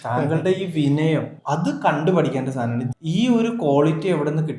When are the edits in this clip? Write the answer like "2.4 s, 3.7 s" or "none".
2.9 s

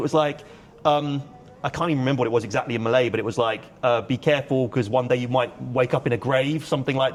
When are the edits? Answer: none

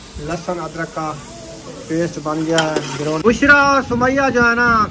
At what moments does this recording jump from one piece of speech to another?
3.2 s

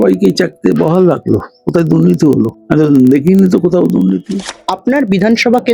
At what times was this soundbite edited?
2.6 s, 4.5 s

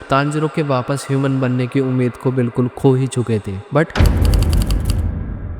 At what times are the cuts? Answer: 3.7 s

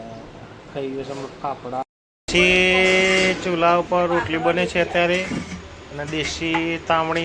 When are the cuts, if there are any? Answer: 1.8 s

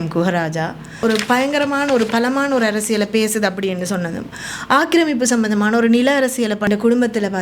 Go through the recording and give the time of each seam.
1.0 s, 6.7 s

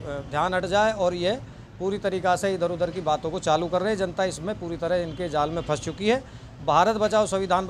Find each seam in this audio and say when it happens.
none

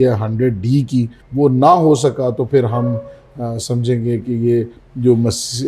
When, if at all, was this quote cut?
1.2 s

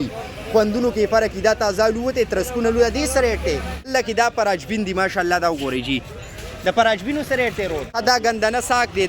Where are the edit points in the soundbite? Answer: 3.9 s, 7.9 s

